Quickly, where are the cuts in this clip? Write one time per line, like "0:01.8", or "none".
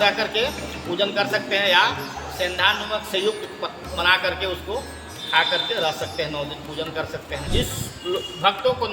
0:07.5